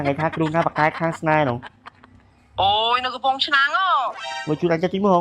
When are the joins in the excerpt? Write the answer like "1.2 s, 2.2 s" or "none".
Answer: 4.3 s